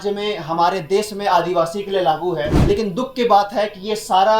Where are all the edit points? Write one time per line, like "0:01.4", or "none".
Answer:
0:02.5